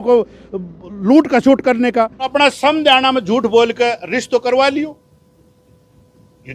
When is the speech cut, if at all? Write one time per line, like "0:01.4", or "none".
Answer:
0:02.3